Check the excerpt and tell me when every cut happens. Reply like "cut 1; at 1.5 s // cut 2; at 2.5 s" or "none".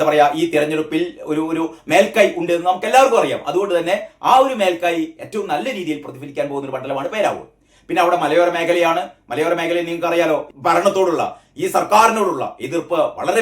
cut 1; at 10.5 s